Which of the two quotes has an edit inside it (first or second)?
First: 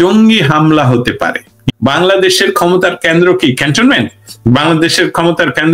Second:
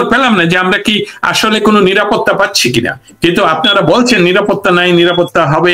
first